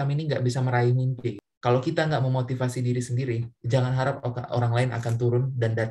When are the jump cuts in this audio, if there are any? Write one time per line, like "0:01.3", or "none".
0:01.5